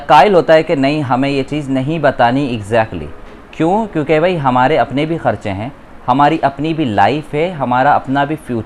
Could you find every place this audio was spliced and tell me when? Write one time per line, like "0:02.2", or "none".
none